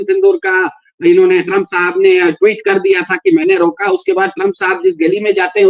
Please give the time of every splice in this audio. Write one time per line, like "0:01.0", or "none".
none